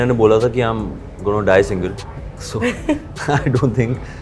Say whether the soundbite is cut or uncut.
uncut